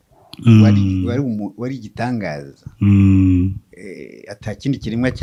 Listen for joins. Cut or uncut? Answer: uncut